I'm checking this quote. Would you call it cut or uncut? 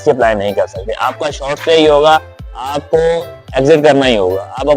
uncut